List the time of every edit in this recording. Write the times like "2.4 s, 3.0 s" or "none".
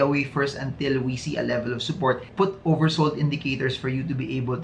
none